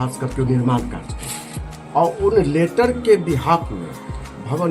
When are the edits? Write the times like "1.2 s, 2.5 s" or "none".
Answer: none